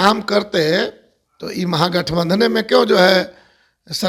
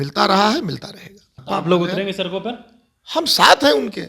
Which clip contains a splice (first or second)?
second